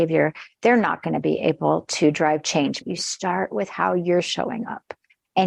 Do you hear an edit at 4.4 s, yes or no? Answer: no